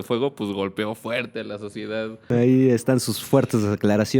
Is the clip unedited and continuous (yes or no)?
no